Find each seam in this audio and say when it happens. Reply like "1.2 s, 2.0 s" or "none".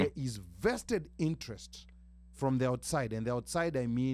none